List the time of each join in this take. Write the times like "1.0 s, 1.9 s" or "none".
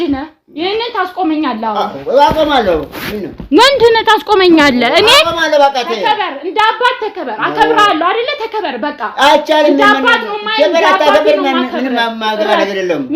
none

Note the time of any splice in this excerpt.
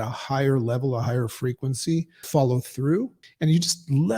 2.2 s, 3.2 s

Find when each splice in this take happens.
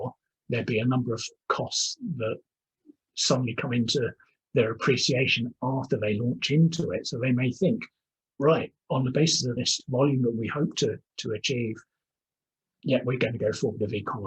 9.5 s

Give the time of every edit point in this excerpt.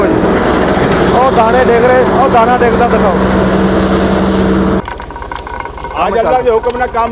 4.8 s

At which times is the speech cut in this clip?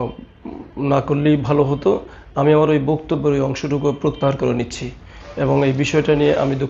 none

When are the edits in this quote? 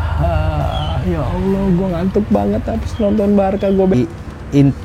3.9 s

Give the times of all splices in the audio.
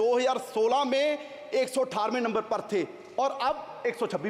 none

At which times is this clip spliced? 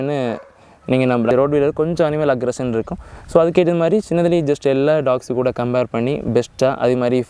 1.3 s

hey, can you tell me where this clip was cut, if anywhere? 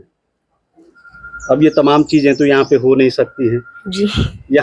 none

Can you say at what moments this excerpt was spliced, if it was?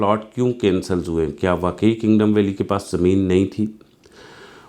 none

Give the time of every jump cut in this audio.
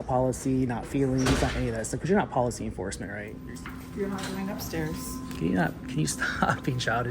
3.3 s

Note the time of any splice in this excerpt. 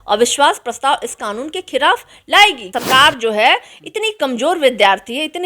2.8 s

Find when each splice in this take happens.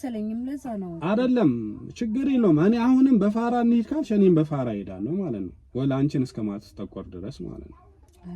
none

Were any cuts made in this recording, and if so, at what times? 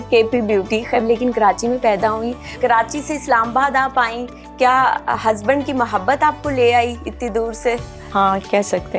1.0 s, 2.6 s

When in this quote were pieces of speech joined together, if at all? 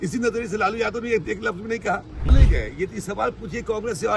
2.3 s

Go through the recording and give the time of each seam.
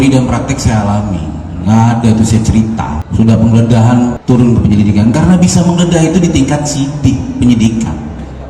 3.0 s, 4.2 s

